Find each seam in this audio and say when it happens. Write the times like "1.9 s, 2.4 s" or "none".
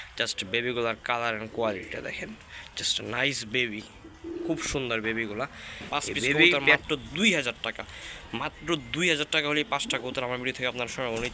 6.8 s